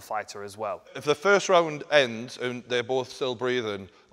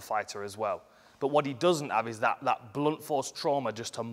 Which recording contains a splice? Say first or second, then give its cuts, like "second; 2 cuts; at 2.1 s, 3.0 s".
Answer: first; 1 cut; at 0.9 s